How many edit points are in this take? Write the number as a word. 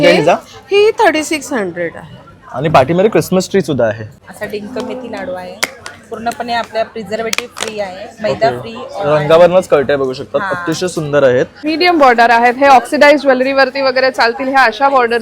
two